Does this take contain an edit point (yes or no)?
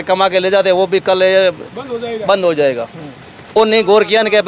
yes